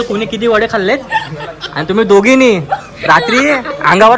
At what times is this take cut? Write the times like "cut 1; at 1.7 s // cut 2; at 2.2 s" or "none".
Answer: none